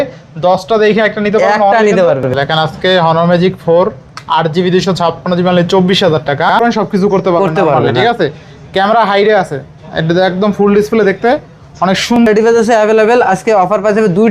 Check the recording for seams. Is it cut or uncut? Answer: cut